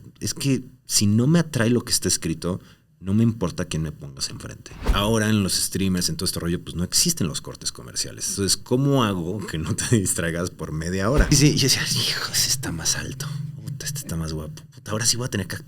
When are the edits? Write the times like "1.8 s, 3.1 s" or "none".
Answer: 4.9 s, 8.2 s, 11.3 s